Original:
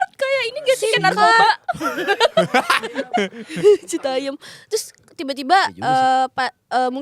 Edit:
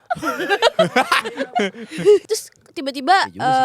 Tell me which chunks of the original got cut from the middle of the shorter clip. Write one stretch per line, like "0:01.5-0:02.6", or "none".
0:03.8-0:04.7